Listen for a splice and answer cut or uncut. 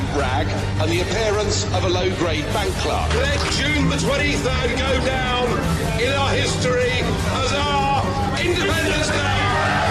uncut